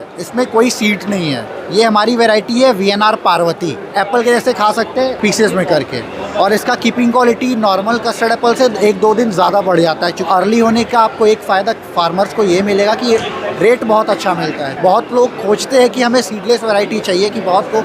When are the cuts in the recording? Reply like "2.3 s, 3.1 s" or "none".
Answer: 3.9 s, 10.3 s, 14.7 s